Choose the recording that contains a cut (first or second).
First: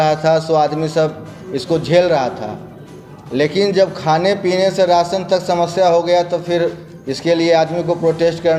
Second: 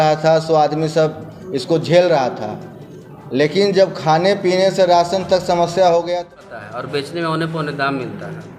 second